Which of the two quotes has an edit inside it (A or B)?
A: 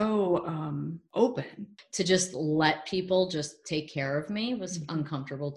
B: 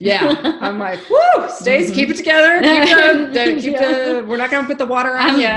A